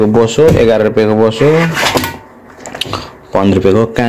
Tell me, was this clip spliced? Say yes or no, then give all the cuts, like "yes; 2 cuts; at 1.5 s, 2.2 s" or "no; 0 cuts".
no; 0 cuts